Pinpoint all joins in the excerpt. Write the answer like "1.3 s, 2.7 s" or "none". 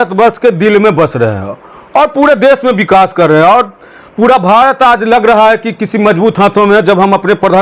none